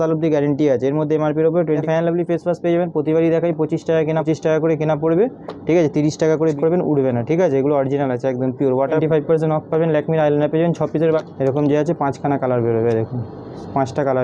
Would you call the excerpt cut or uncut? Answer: cut